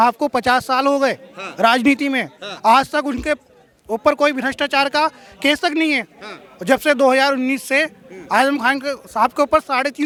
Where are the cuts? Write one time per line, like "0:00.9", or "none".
none